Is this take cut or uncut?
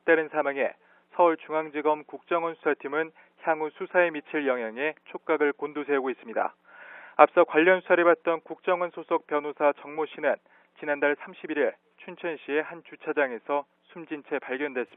uncut